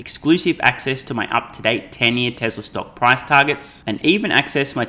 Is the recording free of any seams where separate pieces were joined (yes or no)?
yes